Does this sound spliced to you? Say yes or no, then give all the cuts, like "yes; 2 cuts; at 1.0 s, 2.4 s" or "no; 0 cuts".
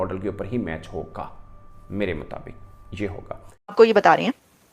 yes; 1 cut; at 3.7 s